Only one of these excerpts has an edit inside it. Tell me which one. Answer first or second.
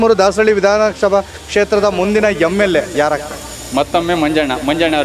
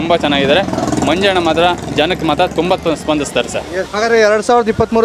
second